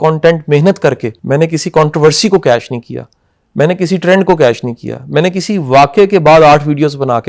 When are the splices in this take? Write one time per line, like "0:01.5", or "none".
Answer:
0:01.1